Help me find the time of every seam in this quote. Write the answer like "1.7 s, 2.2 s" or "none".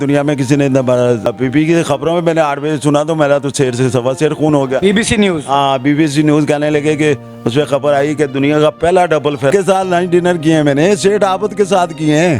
1.3 s, 9.5 s